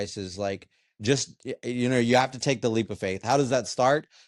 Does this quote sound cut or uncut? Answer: uncut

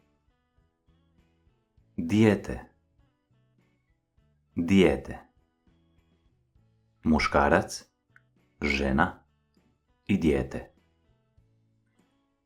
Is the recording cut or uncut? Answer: cut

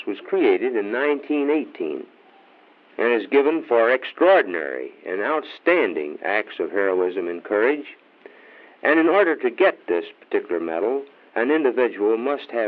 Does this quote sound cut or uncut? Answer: cut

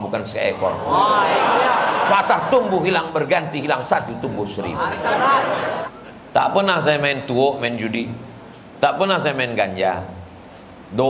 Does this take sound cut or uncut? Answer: cut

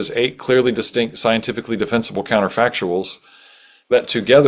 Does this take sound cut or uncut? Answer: uncut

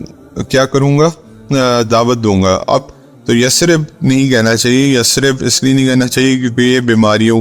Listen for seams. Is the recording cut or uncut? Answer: cut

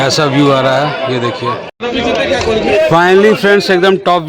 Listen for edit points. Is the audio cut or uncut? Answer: cut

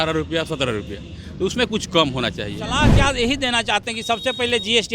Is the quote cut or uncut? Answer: cut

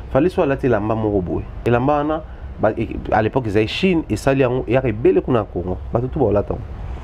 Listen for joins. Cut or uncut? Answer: cut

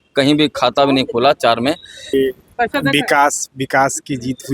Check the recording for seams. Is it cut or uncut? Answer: cut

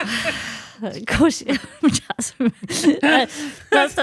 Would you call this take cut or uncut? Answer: uncut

